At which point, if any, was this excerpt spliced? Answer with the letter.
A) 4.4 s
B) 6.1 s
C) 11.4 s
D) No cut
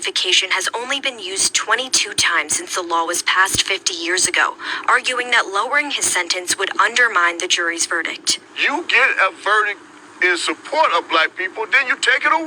D